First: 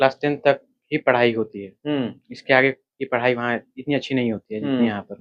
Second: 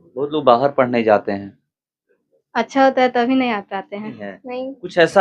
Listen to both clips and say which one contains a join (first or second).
second